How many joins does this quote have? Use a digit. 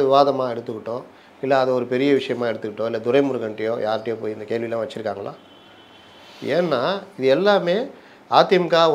0